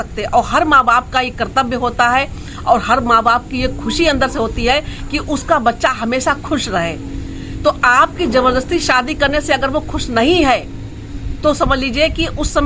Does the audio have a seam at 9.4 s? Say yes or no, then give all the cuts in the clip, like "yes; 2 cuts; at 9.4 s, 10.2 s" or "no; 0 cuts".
no; 0 cuts